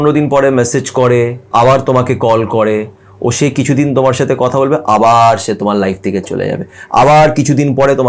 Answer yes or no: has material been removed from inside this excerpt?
yes